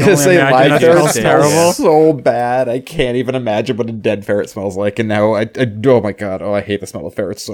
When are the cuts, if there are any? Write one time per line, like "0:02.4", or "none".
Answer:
none